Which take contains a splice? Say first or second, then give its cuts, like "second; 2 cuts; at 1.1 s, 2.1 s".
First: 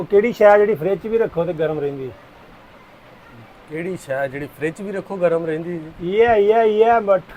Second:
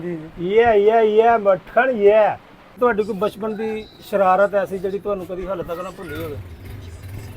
second; 1 cut; at 2.7 s